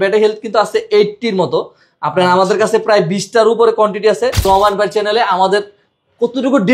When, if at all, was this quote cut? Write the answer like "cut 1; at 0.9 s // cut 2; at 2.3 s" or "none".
cut 1; at 4.4 s